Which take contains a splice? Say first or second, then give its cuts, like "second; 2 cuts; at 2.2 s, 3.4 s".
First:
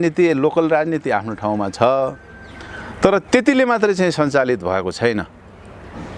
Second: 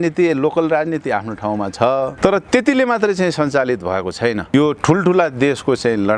second; 2 cuts; at 2.1 s, 4.5 s